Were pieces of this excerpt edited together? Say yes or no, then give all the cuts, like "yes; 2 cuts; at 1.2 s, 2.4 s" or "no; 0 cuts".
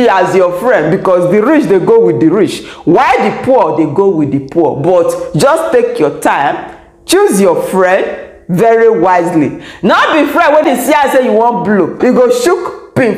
yes; 2 cuts; at 10.6 s, 12.0 s